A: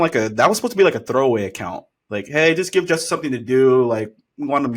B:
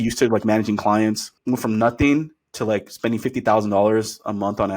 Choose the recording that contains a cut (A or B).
B